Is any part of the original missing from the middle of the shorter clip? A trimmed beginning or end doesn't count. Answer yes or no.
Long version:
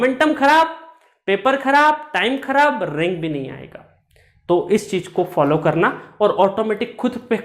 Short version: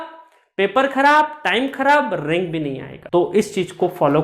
yes